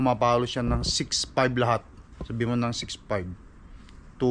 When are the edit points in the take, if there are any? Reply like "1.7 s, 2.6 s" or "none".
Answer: none

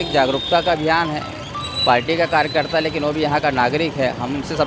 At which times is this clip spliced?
none

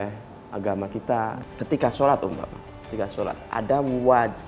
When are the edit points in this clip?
1.4 s

